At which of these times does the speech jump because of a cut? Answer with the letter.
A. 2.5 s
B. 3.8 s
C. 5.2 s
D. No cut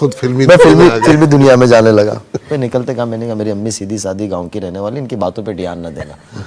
A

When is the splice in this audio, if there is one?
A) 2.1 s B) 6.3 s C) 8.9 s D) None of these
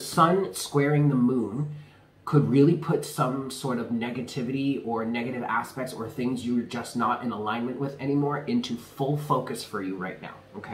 D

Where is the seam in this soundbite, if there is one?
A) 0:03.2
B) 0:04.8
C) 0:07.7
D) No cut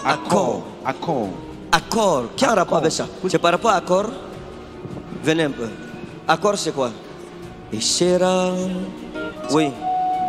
A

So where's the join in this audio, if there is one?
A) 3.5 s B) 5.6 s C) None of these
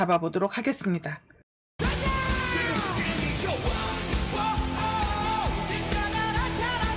C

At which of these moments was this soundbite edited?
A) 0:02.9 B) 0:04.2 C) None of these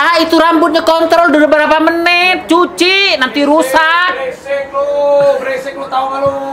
C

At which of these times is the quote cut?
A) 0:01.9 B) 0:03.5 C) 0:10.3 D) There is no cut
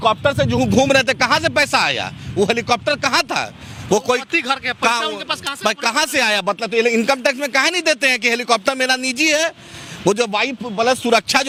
D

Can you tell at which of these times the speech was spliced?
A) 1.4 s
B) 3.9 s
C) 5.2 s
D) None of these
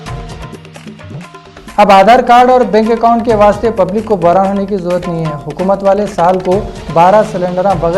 A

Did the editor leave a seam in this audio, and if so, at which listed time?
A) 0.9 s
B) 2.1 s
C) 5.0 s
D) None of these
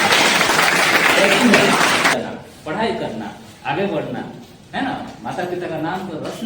B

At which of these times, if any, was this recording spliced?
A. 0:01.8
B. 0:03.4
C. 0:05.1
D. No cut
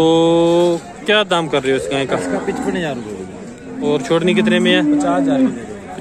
D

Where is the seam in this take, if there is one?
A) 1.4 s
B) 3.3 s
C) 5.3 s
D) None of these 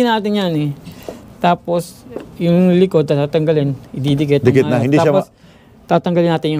D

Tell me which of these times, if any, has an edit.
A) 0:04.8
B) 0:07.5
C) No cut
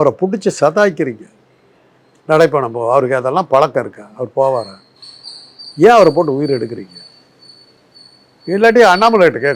C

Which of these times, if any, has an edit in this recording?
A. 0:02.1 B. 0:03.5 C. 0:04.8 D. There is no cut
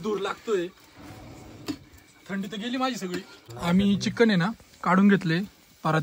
B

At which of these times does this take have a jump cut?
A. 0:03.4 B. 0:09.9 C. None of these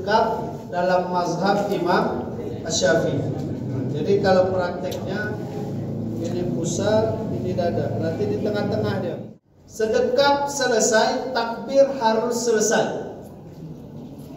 B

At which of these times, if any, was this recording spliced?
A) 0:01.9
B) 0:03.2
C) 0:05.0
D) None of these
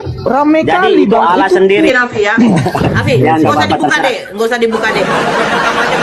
A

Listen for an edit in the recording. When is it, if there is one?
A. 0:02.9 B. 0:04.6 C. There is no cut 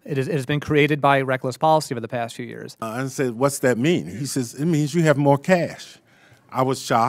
A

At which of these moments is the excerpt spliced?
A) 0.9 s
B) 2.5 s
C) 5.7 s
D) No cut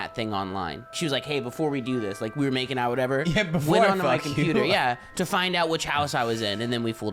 A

